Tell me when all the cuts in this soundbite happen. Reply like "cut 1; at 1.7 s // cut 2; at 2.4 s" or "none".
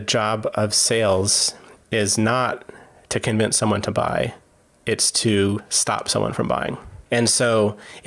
none